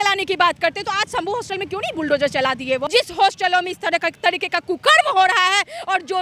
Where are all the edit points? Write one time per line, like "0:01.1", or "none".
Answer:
0:02.8